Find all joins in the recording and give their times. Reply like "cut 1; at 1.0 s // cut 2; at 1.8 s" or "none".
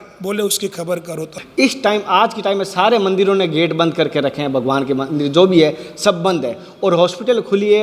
cut 1; at 1.4 s